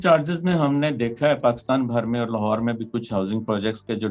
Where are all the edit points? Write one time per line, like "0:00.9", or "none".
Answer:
none